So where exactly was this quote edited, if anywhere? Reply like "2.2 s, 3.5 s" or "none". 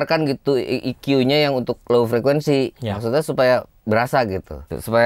1.8 s, 3.7 s